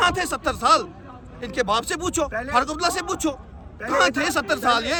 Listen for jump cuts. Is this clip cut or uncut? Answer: uncut